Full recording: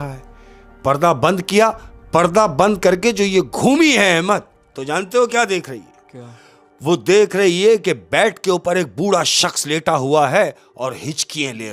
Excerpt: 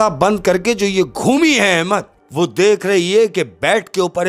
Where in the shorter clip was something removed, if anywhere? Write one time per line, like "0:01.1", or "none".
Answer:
0:02.2